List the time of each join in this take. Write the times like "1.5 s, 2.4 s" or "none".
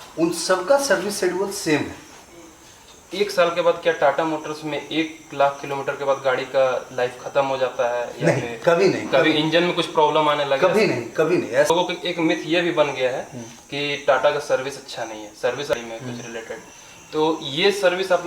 3.1 s, 11.7 s, 15.7 s

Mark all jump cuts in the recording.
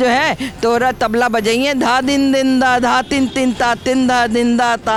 none

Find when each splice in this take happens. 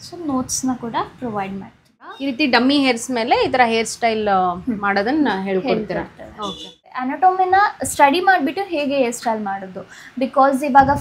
2.1 s, 7.1 s

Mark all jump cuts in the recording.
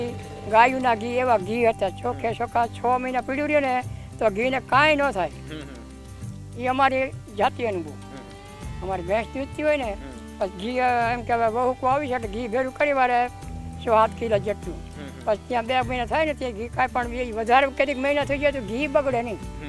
none

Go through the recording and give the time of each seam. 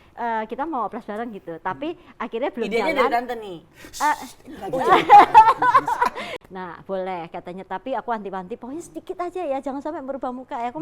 6.2 s

